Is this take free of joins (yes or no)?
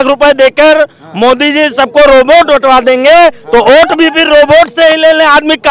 yes